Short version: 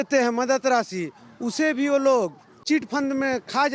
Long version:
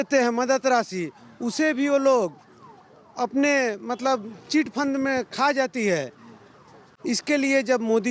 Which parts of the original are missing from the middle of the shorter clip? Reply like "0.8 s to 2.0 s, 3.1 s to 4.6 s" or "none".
2.5 s to 4.3 s